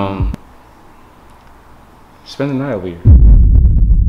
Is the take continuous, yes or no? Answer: no